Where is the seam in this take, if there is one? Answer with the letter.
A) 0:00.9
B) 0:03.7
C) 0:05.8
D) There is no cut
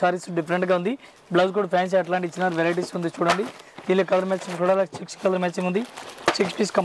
D